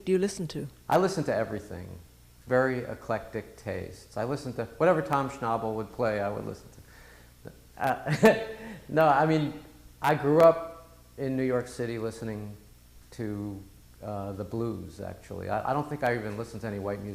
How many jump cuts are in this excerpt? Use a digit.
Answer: 1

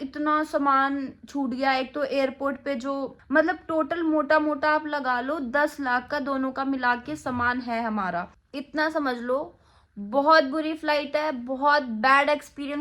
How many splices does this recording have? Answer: 2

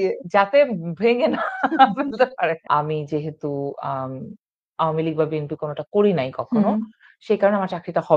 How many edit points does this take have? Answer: 1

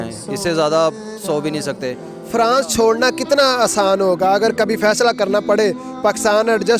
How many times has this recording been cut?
1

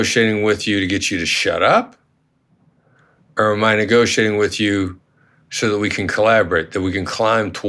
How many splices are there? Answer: 0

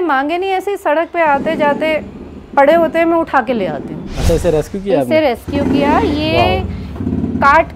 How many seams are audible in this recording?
1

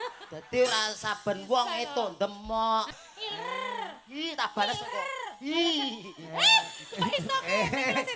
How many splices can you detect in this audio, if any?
1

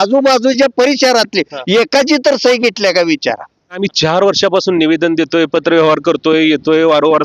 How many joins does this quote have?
1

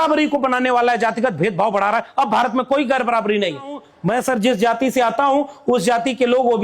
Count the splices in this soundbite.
1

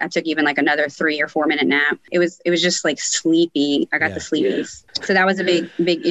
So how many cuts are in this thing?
2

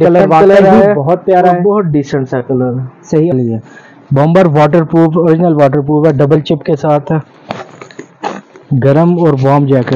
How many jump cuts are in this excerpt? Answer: 1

